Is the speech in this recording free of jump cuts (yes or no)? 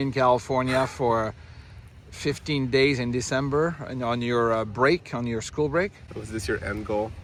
yes